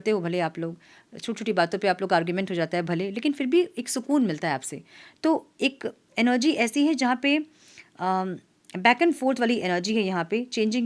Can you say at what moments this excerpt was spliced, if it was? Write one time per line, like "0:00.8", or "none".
none